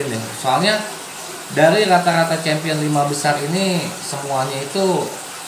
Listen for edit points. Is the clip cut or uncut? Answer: uncut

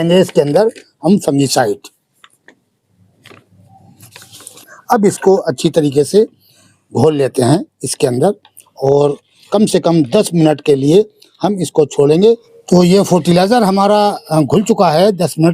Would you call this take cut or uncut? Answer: cut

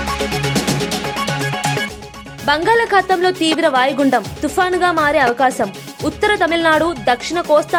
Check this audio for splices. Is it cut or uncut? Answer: uncut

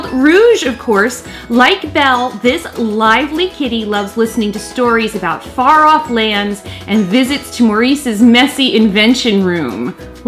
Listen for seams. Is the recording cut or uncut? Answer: uncut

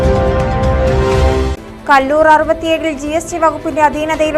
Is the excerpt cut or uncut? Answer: cut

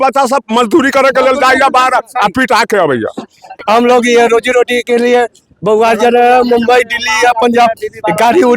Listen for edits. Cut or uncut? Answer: cut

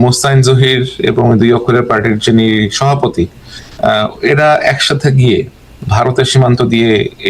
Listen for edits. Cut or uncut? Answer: uncut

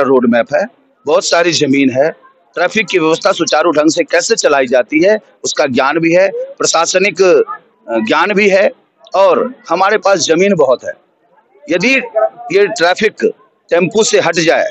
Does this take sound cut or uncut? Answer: uncut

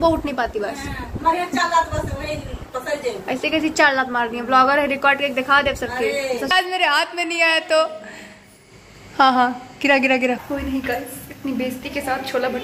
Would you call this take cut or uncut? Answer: cut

